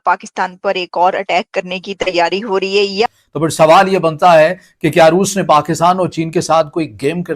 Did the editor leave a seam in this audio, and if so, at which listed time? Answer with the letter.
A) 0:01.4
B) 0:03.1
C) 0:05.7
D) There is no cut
B